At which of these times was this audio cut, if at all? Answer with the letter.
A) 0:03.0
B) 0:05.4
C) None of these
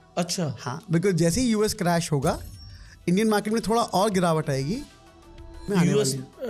B